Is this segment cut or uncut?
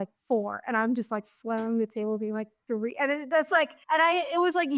cut